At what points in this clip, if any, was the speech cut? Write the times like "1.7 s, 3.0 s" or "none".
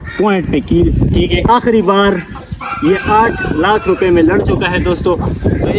1.5 s